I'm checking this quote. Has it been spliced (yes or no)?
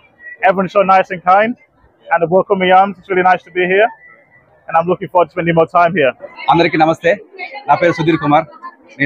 yes